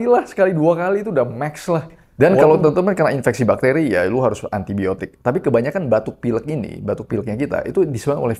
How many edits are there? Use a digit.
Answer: 1